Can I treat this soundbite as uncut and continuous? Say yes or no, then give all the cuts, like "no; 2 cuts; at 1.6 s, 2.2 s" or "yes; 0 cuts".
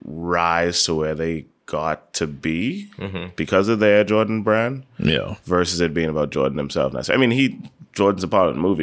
no; 1 cut; at 1.5 s